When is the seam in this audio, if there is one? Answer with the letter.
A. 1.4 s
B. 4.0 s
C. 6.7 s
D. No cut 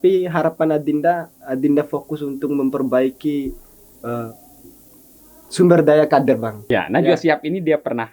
C